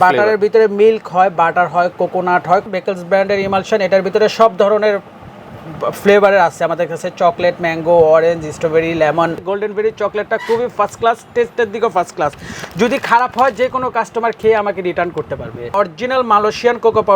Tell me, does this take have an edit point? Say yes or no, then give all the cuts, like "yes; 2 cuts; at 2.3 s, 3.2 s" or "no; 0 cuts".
yes; 3 cuts; at 2.7 s, 9.4 s, 15.7 s